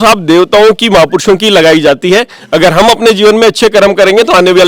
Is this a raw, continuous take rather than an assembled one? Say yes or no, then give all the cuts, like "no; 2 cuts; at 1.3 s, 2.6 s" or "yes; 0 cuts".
yes; 0 cuts